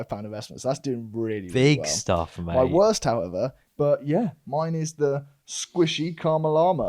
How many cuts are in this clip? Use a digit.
1